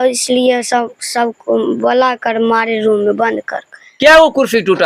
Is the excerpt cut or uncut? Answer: uncut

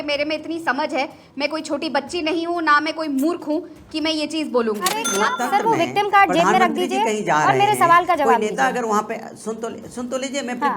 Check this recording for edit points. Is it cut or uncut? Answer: cut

